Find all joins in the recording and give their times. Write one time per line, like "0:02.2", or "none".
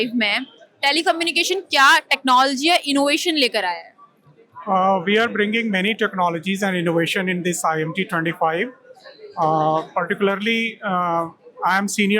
none